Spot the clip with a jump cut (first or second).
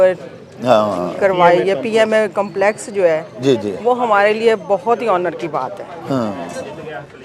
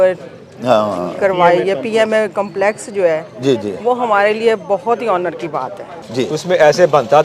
second